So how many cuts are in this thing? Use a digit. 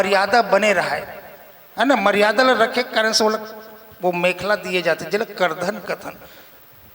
0